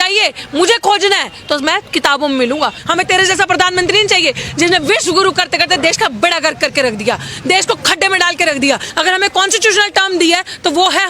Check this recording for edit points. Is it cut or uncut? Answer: cut